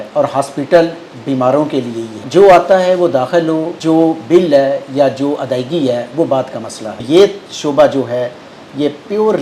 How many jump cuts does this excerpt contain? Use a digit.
3